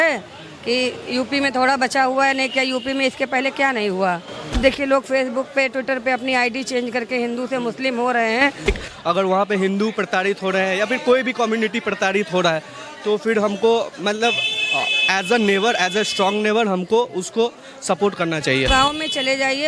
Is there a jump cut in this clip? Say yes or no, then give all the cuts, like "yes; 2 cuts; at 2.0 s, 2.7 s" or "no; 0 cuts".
yes; 3 cuts; at 4.6 s, 8.7 s, 18.7 s